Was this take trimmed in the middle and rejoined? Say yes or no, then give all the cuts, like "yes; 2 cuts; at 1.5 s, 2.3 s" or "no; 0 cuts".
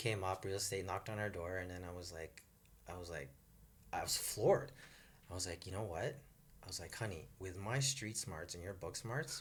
no; 0 cuts